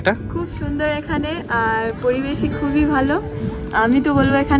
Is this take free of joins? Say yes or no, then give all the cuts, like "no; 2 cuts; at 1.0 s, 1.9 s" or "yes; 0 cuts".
yes; 0 cuts